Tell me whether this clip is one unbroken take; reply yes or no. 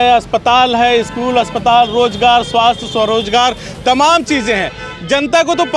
yes